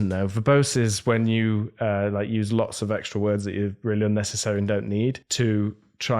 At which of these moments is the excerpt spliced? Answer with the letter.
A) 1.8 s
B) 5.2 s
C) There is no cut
B